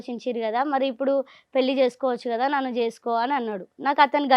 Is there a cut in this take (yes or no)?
no